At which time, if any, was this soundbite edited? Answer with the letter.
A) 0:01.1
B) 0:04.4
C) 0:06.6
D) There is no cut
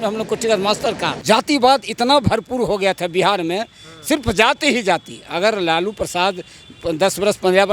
A